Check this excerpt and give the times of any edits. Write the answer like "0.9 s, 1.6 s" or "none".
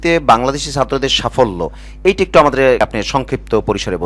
2.8 s